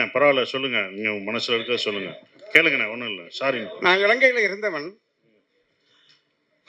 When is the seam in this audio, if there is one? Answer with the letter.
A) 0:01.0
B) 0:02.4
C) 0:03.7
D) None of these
C